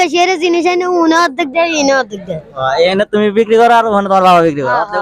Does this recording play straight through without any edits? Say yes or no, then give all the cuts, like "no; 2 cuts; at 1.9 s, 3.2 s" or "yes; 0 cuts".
yes; 0 cuts